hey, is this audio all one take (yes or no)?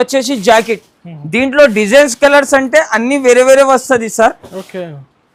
yes